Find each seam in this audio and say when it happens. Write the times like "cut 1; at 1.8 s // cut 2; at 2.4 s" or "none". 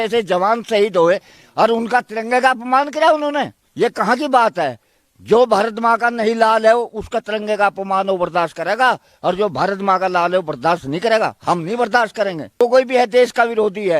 cut 1; at 3.6 s // cut 2; at 12.6 s